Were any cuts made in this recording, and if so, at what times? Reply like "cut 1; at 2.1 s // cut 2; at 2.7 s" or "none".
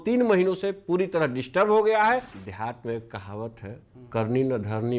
cut 1; at 2.3 s